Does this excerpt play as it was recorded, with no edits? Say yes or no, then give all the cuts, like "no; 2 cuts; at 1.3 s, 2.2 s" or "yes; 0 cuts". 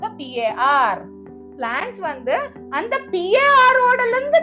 yes; 0 cuts